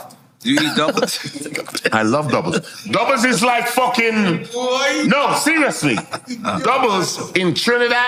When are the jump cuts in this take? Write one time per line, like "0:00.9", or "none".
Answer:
none

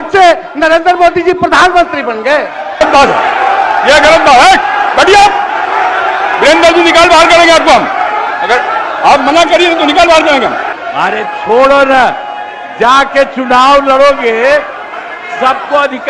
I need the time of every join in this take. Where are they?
0:02.8
0:10.7

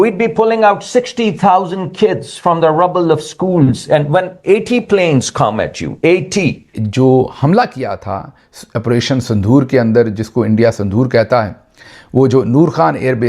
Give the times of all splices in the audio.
0:06.8

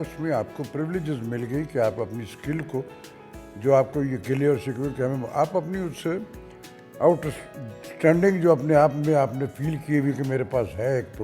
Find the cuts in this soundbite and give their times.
none

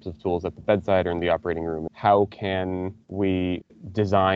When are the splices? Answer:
0:01.9
0:03.0

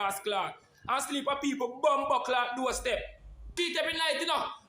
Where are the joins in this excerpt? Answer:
0:03.5

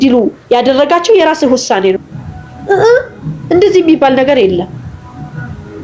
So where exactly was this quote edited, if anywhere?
0:02.1

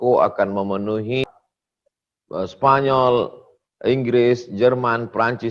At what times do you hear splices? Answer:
0:01.2

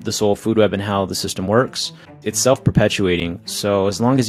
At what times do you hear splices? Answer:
0:02.2

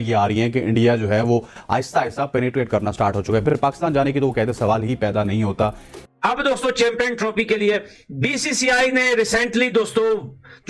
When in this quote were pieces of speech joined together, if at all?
0:03.4
0:05.9

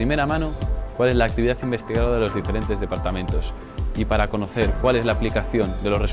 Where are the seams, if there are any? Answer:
none

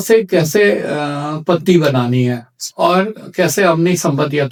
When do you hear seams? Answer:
none

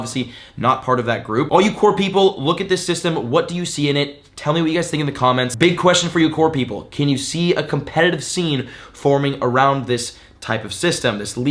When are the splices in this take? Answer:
0:01.5

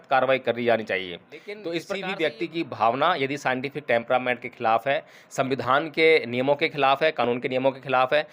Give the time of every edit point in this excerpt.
0:01.6

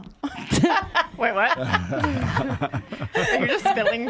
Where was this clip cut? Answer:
none

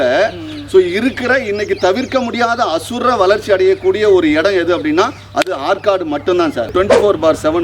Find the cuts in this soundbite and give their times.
0:06.7

